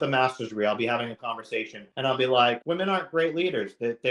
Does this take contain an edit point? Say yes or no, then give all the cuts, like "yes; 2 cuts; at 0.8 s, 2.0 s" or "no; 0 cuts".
yes; 2 cuts; at 1.8 s, 2.6 s